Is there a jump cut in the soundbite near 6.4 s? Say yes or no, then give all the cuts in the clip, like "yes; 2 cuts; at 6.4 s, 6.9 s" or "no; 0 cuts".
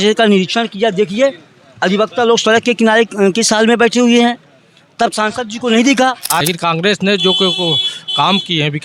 yes; 1 cut; at 6.4 s